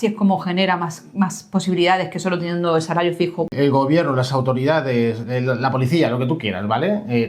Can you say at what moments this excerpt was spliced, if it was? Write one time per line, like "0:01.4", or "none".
0:03.5